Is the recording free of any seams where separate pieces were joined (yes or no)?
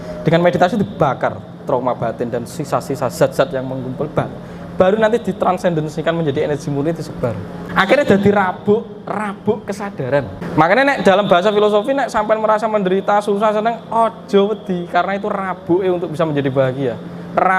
no